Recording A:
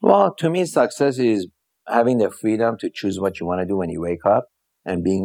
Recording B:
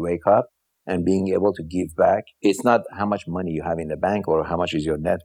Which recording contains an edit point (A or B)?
B